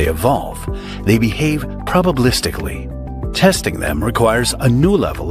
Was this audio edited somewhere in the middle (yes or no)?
no